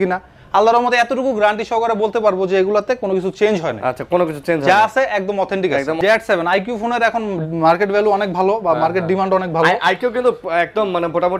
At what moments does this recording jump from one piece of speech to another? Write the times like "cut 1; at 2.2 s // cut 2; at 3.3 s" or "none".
cut 1; at 6.0 s